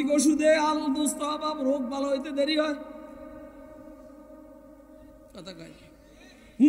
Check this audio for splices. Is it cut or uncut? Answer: uncut